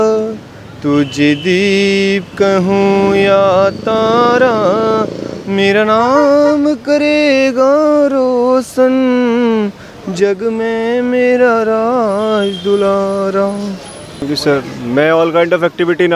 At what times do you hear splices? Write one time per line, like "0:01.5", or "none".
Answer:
none